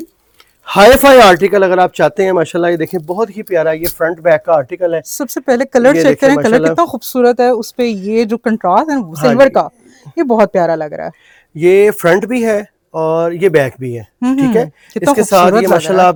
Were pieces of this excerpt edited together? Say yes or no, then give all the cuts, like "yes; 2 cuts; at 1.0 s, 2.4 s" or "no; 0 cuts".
no; 0 cuts